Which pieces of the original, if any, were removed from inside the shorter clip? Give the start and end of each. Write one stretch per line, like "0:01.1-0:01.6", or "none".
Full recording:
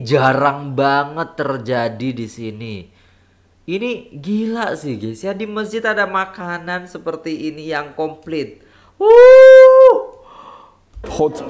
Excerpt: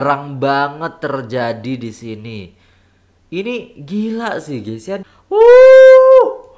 0:05.4-0:08.7